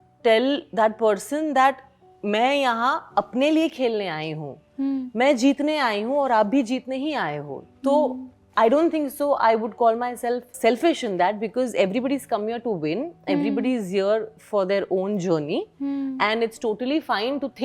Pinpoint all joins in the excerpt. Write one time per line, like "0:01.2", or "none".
none